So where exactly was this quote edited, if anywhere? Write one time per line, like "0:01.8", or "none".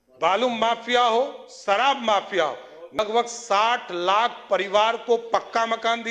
0:03.0